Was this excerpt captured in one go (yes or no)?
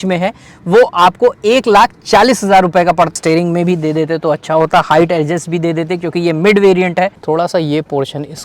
no